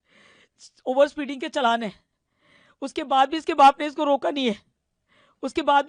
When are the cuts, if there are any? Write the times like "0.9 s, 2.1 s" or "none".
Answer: none